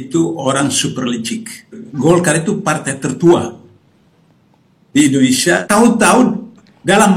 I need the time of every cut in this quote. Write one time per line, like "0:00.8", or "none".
0:01.8
0:05.6